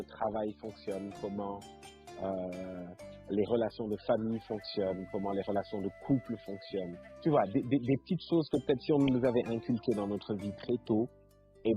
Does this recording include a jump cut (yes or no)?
yes